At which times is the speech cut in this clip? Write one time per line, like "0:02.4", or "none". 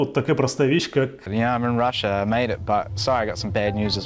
0:01.3

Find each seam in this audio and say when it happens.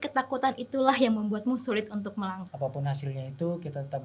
0:02.4

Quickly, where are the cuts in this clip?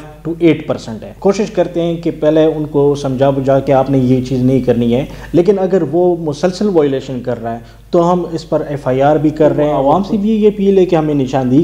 0:01.1
0:03.6
0:09.8

